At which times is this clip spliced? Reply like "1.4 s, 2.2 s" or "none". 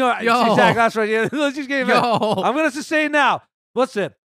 none